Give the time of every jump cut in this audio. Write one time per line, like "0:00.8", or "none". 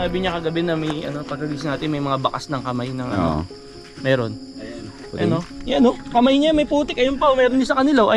0:05.6